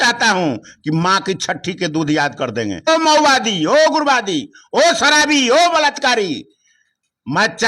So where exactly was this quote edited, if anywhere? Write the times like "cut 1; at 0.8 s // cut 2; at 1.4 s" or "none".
cut 1; at 2.9 s